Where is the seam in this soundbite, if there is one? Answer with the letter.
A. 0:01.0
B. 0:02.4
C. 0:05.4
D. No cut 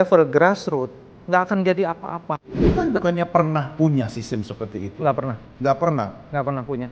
B